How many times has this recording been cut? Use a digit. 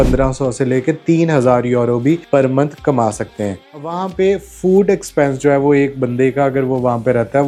0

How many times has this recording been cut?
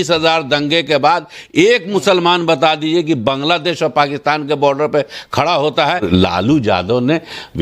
1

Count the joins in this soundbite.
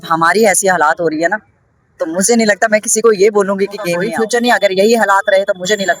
1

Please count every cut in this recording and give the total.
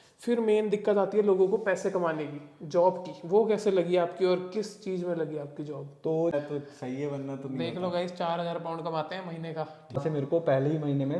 2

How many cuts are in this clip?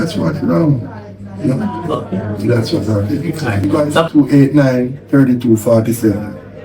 1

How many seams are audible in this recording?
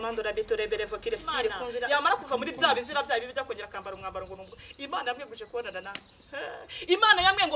1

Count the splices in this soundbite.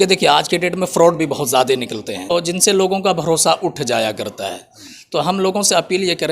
1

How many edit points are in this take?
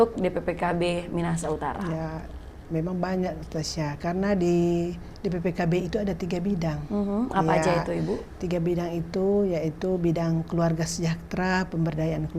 0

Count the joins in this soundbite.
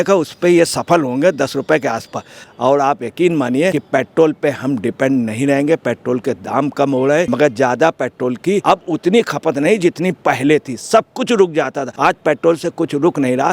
5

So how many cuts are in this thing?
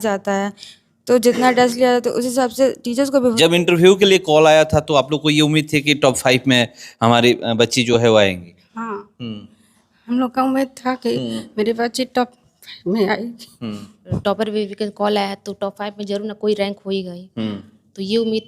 2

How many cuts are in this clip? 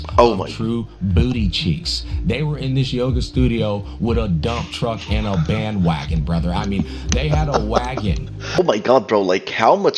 1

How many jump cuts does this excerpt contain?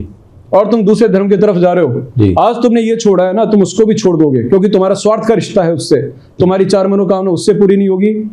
0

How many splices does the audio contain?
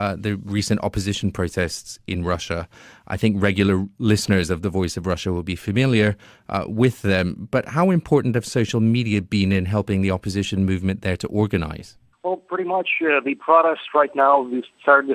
1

